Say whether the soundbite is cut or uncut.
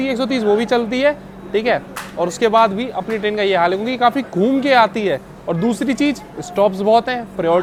uncut